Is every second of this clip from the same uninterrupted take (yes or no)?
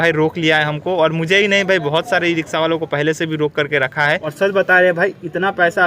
no